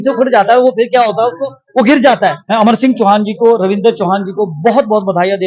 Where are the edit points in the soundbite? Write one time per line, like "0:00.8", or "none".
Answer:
0:02.4